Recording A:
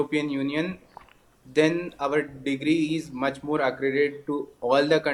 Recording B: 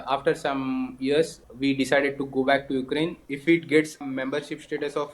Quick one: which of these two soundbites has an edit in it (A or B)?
B